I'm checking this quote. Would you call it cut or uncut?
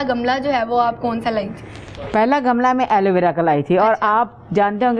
uncut